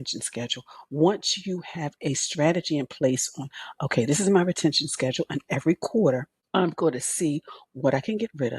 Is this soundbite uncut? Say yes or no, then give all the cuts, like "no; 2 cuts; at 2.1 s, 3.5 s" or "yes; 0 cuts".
no; 1 cut; at 6.4 s